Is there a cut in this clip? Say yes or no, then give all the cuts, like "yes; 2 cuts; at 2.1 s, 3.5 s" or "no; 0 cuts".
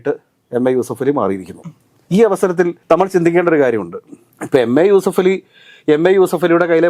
no; 0 cuts